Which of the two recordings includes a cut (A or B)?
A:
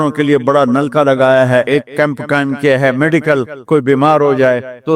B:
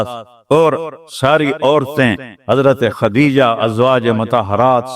A